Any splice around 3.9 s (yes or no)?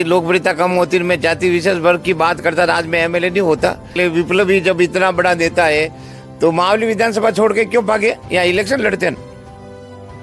yes